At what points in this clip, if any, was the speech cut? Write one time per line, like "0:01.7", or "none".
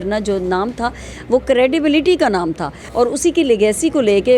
none